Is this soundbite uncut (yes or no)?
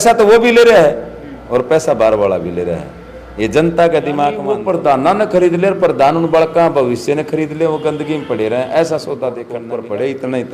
no